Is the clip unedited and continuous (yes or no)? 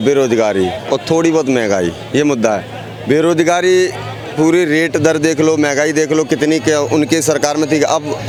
yes